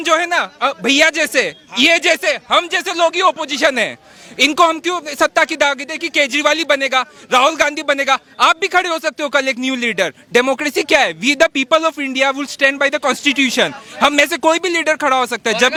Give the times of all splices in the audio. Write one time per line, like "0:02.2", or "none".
none